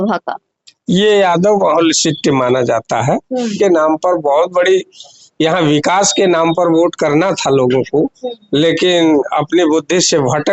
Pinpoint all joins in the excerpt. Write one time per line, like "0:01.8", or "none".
0:03.5